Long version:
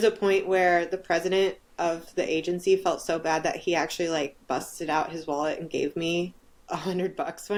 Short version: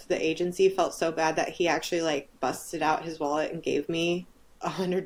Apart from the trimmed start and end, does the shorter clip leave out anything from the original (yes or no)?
no